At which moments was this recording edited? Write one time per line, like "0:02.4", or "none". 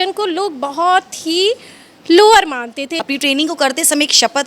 0:02.9